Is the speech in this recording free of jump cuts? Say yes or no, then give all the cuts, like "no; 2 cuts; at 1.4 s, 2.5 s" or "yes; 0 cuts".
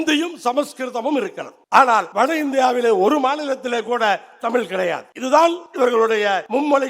no; 4 cuts; at 1.5 s, 2.1 s, 5.1 s, 6.0 s